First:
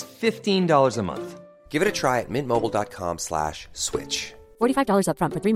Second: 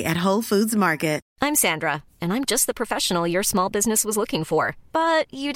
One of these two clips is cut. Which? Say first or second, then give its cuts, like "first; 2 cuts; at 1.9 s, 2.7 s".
second; 1 cut; at 1.3 s